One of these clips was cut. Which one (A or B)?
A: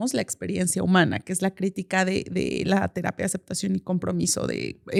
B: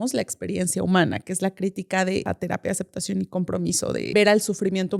B